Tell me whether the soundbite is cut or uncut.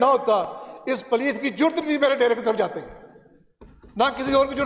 uncut